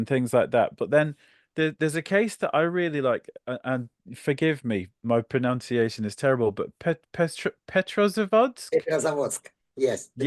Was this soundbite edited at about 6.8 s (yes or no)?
no